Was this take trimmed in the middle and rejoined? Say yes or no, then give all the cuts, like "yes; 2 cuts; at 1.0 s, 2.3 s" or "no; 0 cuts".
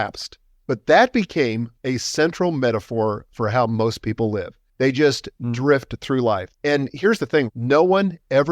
yes; 3 cuts; at 1.7 s, 4.6 s, 6.5 s